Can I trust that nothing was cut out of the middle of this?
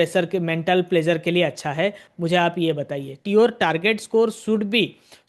no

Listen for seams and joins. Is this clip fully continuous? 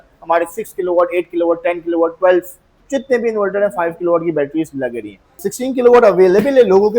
no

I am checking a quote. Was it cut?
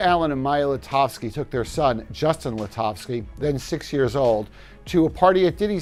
no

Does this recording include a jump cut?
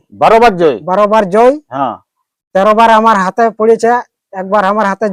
no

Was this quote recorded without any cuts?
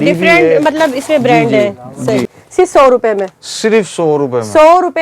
no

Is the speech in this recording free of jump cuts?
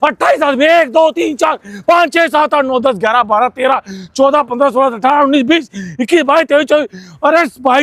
yes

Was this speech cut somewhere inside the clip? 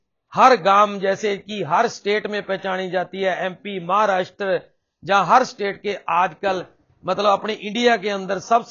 no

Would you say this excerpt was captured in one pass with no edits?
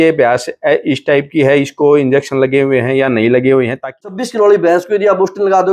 no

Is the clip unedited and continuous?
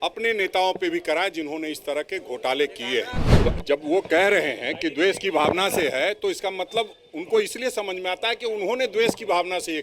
no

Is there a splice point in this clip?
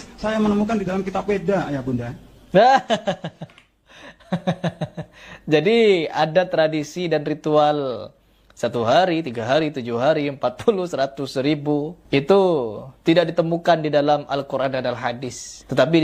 no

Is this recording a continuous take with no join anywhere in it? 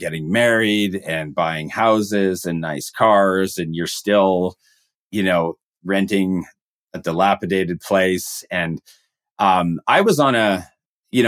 yes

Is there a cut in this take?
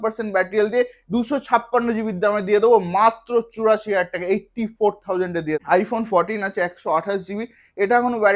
yes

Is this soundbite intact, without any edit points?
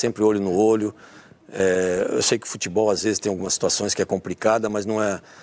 yes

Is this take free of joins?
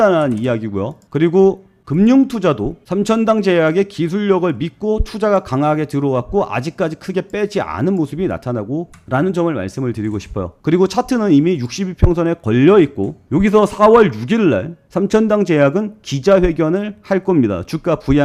yes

